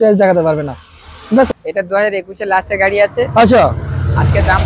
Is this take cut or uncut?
cut